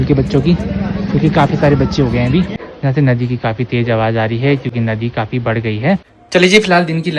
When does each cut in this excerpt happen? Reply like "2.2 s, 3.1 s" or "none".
2.6 s, 6.1 s